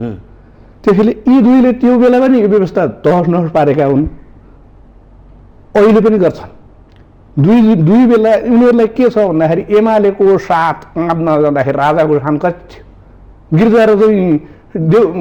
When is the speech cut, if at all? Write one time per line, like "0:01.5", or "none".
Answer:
none